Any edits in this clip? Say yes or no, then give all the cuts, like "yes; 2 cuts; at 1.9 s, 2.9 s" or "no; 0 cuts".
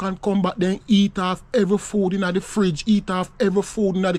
no; 0 cuts